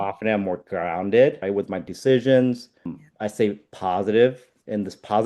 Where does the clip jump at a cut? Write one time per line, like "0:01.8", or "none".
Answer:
0:01.4